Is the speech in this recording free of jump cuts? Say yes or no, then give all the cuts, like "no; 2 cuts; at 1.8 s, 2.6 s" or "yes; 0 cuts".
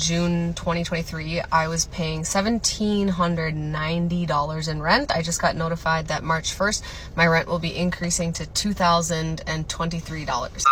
yes; 0 cuts